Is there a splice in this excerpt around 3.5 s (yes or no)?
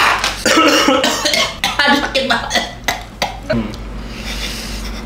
yes